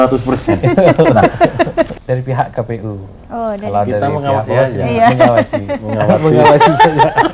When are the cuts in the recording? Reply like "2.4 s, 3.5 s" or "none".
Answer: 2.0 s